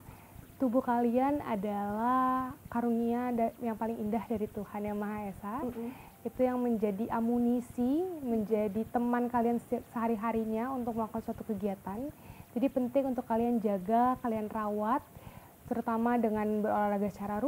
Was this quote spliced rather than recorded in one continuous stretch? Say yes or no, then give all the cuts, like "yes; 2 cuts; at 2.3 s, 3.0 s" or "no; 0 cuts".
no; 0 cuts